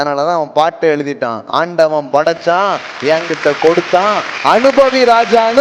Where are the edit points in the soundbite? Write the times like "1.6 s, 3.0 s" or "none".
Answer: none